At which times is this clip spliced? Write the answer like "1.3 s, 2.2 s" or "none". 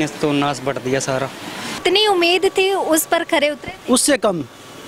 1.8 s